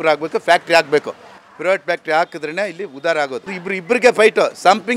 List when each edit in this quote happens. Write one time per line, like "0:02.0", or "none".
0:03.7